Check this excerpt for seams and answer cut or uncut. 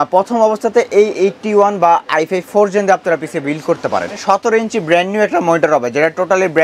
cut